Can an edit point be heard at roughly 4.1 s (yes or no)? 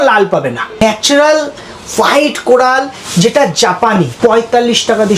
yes